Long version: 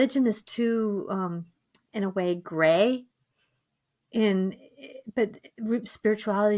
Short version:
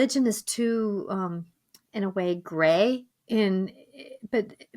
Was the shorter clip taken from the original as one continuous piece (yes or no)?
no